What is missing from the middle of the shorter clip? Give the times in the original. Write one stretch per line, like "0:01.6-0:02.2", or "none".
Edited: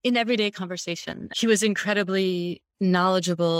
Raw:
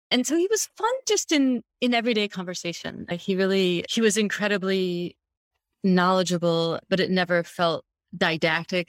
0:03.1-0:03.9
0:05.2-0:05.6